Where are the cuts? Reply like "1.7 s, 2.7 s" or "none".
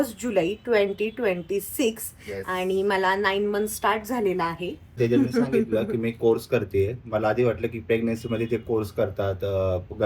4.8 s